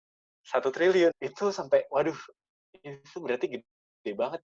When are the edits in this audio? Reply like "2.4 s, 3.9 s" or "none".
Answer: 1.2 s